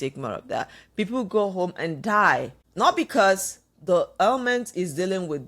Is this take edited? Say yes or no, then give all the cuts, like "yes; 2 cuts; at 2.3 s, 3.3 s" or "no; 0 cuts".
yes; 1 cut; at 2.6 s